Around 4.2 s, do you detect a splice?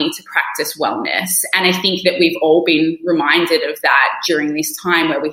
yes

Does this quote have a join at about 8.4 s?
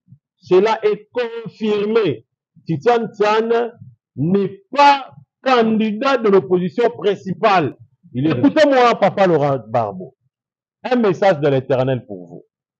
yes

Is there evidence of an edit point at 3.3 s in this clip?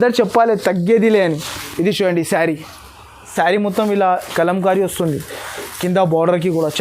yes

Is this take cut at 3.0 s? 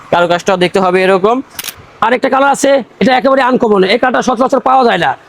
no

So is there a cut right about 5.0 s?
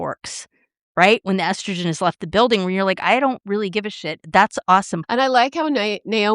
yes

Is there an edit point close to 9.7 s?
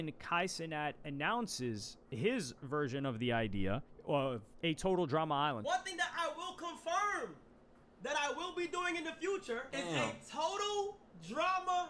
yes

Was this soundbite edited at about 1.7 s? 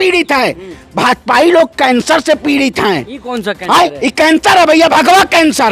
no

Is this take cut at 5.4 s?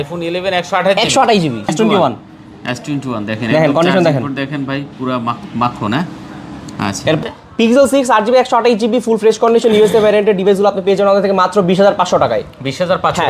no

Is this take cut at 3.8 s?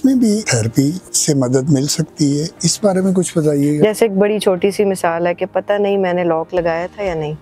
yes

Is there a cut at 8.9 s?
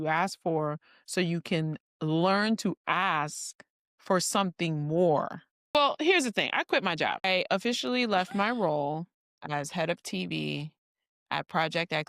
no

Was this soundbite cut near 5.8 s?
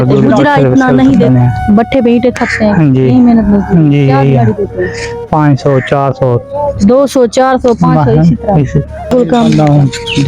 no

